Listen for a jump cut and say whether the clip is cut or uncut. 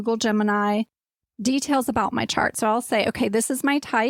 uncut